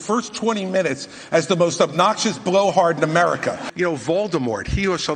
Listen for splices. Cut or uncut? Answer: cut